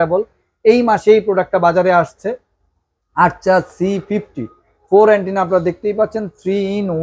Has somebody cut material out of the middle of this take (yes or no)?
no